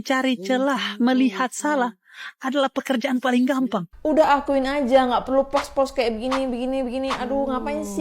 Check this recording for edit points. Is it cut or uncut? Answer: cut